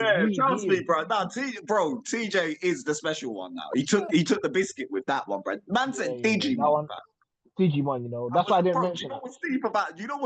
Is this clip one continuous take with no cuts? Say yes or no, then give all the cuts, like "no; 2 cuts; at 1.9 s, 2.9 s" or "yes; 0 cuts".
yes; 0 cuts